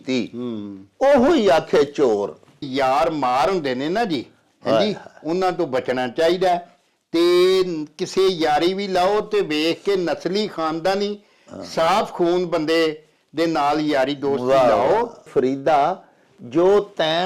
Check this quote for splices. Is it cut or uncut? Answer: cut